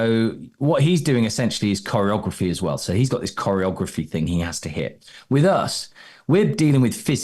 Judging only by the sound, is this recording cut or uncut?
uncut